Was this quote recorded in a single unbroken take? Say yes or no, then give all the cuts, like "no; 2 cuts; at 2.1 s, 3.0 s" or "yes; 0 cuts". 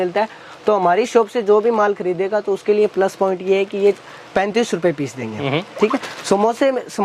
yes; 0 cuts